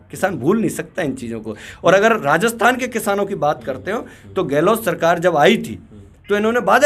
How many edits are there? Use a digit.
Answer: 0